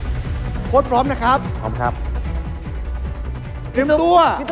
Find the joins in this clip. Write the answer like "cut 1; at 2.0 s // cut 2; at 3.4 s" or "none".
none